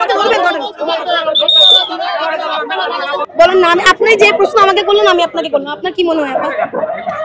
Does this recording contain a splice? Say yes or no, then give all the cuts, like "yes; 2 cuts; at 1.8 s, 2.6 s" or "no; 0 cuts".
yes; 1 cut; at 3.3 s